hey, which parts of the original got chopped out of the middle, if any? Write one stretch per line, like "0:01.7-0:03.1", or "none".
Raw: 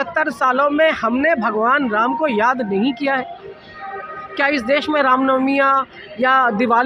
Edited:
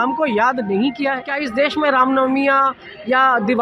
0:03.3-0:04.4

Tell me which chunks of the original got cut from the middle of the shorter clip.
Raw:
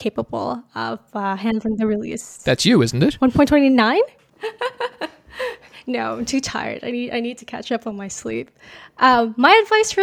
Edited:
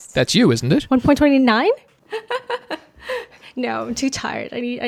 none

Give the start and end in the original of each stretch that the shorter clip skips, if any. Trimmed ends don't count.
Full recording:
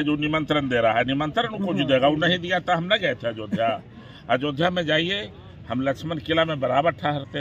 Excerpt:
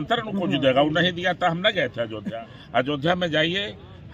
0:03.5-0:03.8

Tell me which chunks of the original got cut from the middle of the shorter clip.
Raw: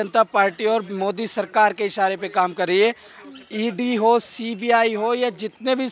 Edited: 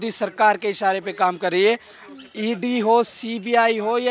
none

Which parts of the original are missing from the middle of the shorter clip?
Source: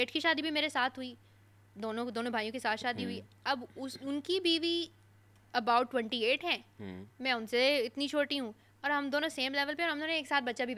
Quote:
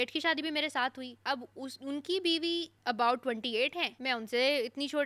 0:01.1-0:03.3
0:04.9-0:05.4
0:06.6-0:07.1

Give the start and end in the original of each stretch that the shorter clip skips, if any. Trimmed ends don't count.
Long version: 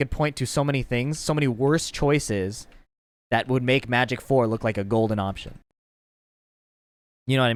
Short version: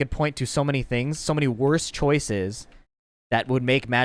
none

